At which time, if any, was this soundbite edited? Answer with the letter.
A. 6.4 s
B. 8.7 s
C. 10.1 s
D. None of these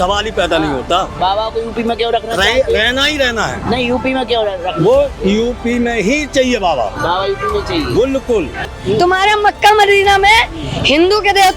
B